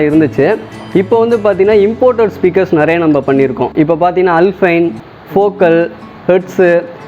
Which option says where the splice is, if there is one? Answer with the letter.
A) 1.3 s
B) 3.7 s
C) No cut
C